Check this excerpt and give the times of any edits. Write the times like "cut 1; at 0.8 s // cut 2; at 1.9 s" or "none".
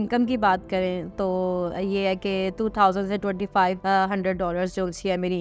none